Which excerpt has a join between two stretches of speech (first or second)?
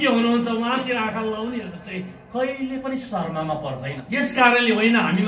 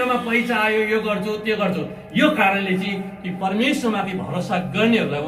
first